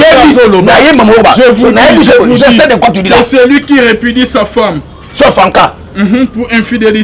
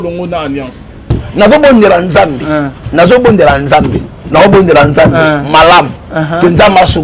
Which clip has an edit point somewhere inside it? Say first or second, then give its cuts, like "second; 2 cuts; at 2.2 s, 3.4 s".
second; 1 cut; at 1.2 s